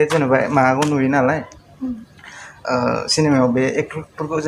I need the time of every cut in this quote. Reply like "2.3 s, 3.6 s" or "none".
none